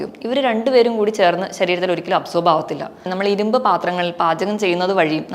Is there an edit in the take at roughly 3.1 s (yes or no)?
yes